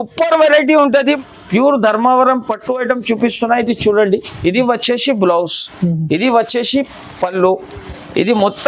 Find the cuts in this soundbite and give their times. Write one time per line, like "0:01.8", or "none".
0:01.2